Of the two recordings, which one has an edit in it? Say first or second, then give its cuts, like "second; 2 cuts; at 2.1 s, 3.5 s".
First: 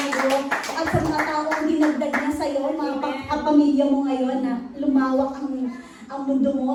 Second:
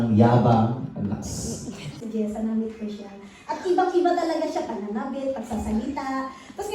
second; 1 cut; at 2.0 s